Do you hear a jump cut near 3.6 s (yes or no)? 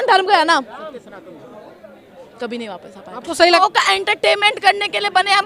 yes